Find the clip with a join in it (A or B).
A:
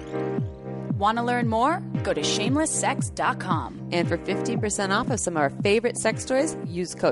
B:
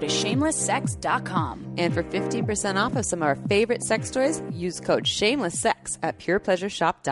A